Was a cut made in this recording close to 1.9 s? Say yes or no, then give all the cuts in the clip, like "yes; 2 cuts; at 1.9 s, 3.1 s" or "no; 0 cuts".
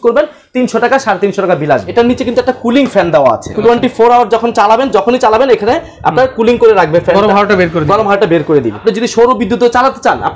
yes; 3 cuts; at 1.9 s, 3.5 s, 8.8 s